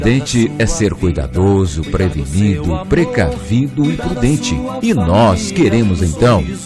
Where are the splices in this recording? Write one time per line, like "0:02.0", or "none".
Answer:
none